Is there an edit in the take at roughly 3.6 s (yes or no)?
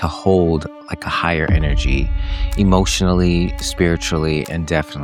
no